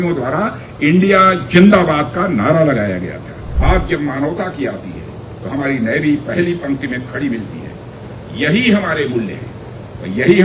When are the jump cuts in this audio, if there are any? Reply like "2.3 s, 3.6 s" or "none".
3.6 s